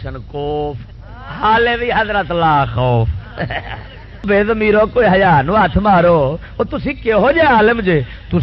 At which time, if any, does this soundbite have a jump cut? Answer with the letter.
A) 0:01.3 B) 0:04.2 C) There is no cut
B